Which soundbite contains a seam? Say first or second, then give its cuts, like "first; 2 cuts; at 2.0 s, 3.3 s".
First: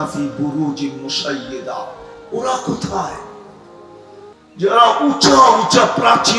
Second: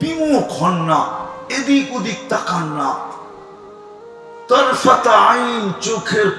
second; 2 cuts; at 3.2 s, 4.5 s